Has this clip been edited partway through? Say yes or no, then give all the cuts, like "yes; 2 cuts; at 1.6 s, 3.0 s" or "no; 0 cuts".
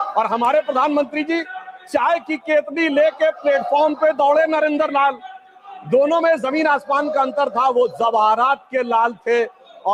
no; 0 cuts